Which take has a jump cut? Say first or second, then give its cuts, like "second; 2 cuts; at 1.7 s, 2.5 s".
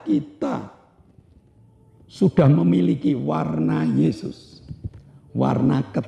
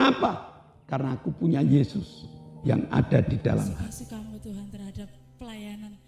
second; 1 cut; at 3.8 s